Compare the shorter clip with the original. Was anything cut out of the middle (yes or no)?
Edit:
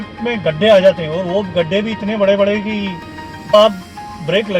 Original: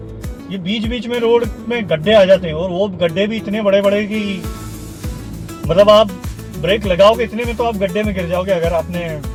yes